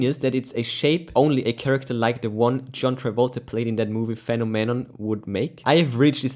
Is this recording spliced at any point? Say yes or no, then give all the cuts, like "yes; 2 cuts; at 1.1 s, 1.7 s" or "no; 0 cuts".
no; 0 cuts